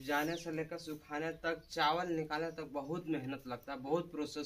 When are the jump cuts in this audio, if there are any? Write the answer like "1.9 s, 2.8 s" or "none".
none